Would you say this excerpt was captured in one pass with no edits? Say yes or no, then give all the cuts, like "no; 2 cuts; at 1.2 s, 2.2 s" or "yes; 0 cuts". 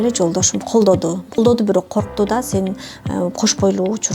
no; 1 cut; at 1.4 s